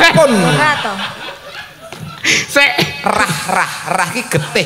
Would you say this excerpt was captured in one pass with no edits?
yes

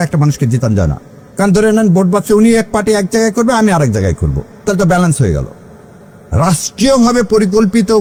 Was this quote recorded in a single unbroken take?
yes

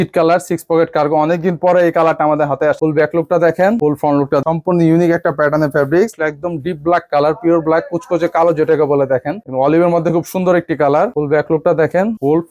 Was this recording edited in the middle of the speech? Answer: yes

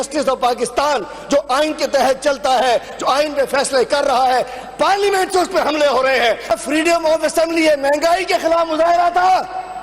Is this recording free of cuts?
no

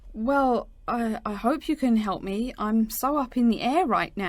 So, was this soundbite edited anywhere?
no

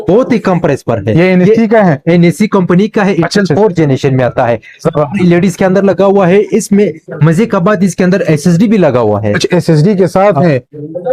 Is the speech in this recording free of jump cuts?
yes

